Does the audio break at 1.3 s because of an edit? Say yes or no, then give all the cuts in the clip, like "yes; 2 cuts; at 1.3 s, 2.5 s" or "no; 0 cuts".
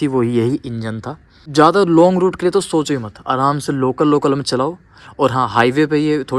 no; 0 cuts